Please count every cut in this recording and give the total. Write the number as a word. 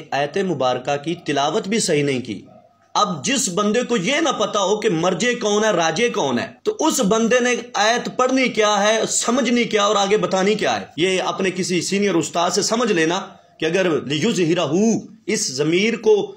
two